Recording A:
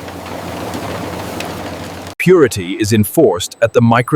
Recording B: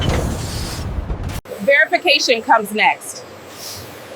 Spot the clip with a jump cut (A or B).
A